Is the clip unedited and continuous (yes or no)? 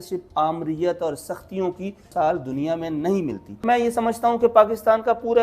no